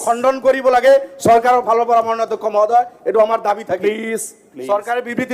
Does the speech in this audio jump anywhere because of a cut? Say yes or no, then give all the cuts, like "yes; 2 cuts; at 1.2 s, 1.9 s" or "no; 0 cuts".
no; 0 cuts